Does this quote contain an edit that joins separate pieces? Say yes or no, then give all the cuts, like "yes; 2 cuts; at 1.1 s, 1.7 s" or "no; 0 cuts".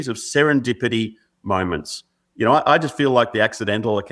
no; 0 cuts